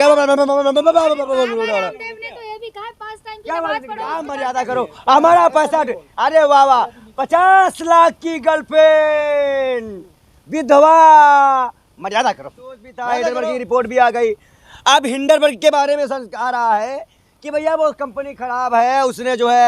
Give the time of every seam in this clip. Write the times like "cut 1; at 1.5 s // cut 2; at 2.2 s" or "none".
cut 1; at 4.4 s // cut 2; at 13.1 s